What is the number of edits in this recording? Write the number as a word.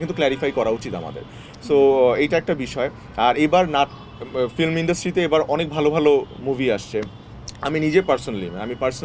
zero